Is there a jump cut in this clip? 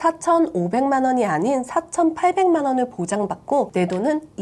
no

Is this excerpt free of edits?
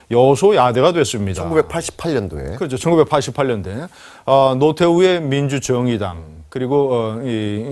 yes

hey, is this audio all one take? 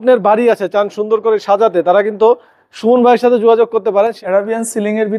no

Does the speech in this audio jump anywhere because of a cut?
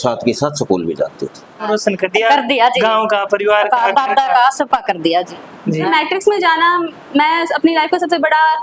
yes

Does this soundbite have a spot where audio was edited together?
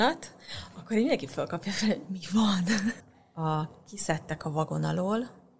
yes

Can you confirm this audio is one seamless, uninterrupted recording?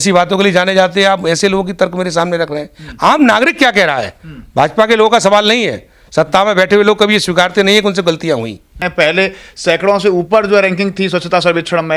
no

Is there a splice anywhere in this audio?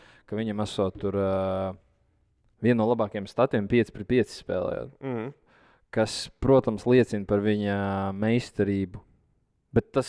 no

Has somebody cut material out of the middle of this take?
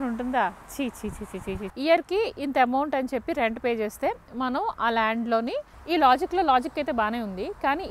yes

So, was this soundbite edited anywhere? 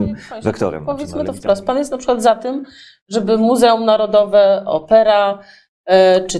yes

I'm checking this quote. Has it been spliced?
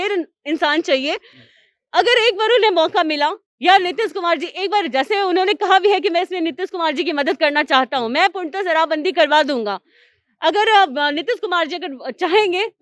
no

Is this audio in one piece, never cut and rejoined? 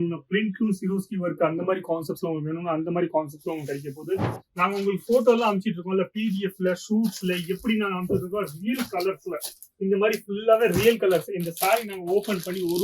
no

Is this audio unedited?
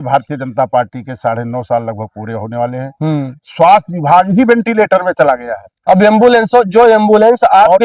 yes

